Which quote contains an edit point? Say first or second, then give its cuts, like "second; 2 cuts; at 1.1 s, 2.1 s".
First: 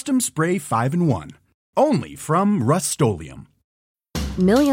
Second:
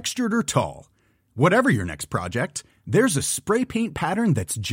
first; 1 cut; at 3.8 s